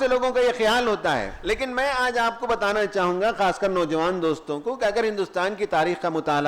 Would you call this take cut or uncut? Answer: cut